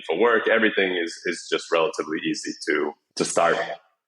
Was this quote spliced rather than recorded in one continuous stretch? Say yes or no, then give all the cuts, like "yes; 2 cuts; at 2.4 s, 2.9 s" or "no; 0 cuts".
yes; 1 cut; at 3.0 s